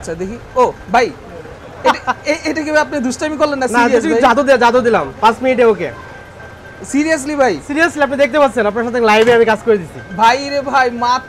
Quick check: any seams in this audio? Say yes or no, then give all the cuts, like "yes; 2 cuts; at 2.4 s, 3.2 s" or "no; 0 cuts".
no; 0 cuts